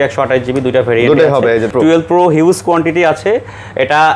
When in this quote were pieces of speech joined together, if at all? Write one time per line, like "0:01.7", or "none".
0:01.7